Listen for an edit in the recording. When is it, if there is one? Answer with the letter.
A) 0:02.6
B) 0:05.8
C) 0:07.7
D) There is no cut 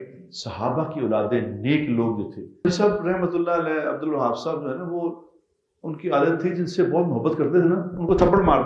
A